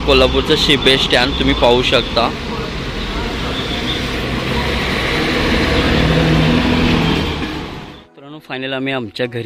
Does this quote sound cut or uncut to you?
cut